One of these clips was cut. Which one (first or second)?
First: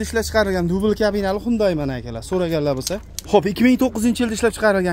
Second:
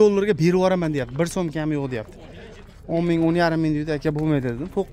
first